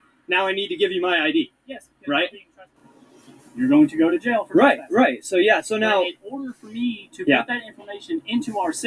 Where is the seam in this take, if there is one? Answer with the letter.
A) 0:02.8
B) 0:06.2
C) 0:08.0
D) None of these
A